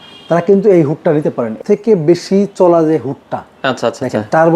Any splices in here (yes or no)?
yes